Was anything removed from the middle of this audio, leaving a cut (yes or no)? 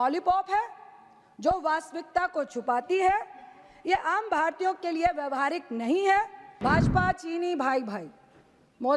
yes